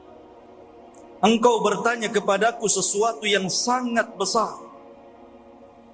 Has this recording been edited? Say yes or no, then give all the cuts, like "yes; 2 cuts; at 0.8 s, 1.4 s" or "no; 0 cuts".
yes; 1 cut; at 1.2 s